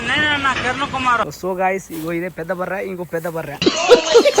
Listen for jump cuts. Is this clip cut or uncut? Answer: cut